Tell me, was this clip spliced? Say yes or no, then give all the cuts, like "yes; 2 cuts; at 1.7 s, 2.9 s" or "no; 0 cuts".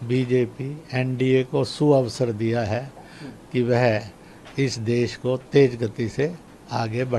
no; 0 cuts